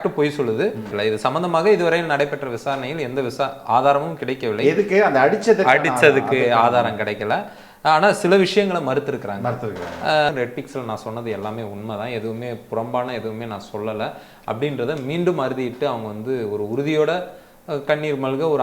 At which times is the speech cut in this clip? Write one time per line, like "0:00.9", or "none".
0:00.9
0:10.3